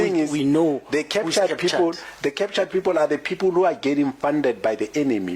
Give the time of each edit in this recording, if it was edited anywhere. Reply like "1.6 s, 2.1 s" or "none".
none